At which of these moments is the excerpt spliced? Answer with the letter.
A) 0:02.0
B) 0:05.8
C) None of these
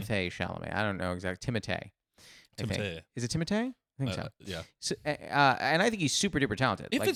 C